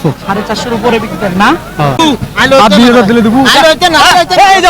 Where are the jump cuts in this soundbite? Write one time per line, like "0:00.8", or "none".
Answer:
0:02.0